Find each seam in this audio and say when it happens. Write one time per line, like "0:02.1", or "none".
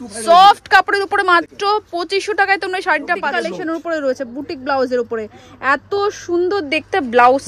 0:03.3